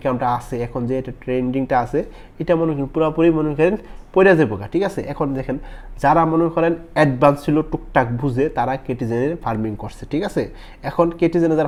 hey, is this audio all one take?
yes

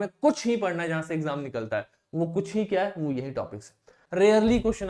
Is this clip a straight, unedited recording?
no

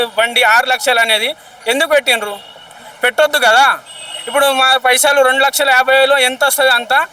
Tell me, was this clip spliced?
no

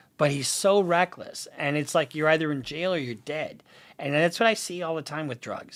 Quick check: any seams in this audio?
no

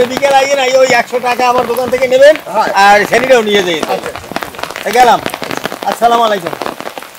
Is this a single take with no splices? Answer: yes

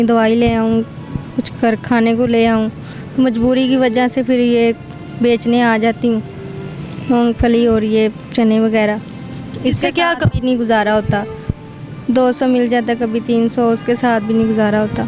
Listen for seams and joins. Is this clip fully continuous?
yes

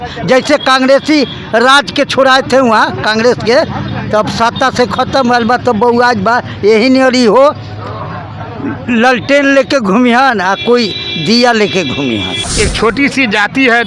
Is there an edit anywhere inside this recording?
yes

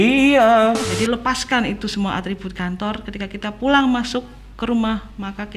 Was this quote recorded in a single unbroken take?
no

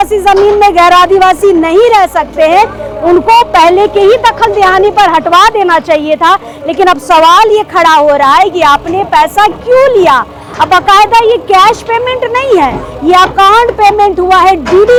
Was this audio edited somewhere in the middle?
no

